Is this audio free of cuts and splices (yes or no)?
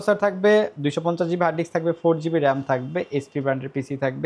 yes